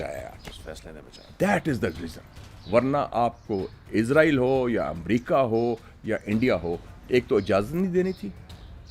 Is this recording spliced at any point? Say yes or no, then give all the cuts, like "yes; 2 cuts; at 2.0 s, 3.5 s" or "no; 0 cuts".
no; 0 cuts